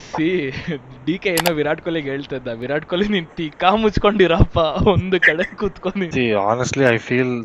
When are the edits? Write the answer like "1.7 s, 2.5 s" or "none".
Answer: 6.1 s